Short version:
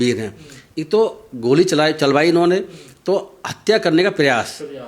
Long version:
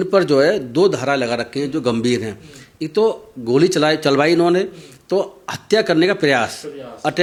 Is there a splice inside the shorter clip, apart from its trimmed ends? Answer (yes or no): no